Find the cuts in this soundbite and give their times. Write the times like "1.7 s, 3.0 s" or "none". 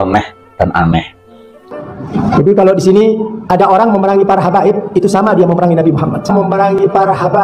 1.7 s